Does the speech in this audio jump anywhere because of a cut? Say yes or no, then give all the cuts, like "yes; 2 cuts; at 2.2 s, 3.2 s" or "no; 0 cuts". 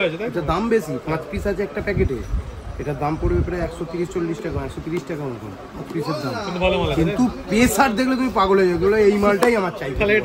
no; 0 cuts